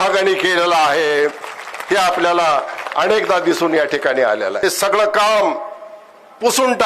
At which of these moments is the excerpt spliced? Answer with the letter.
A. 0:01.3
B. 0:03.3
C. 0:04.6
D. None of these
C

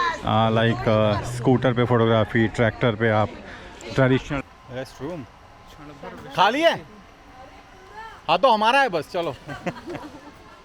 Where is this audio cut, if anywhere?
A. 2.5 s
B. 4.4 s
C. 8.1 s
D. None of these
B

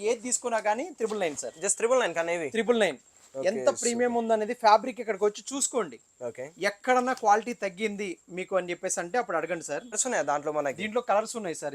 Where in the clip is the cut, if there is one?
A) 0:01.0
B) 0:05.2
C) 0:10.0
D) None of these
C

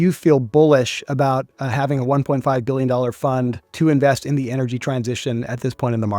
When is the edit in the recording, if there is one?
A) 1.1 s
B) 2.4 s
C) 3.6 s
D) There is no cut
C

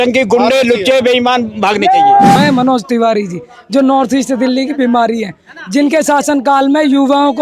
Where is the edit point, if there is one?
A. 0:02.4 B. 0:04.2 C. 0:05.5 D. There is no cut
A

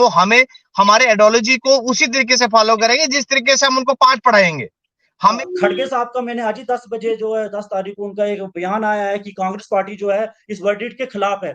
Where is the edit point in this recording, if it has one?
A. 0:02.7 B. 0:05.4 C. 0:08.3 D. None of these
B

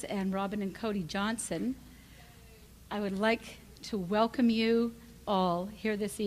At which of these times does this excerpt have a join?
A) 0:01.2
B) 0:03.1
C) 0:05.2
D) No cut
B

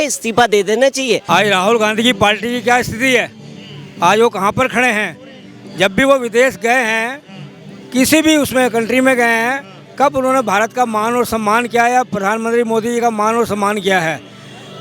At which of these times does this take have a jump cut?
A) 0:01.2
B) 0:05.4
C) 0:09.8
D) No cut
A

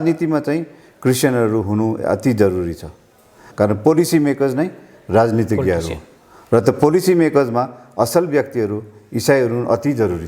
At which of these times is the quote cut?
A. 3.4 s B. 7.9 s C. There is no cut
A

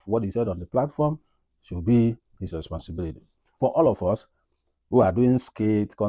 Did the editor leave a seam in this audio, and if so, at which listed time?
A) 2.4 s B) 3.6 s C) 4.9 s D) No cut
B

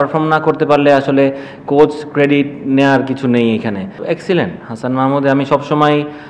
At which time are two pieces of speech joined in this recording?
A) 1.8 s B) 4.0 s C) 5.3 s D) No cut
B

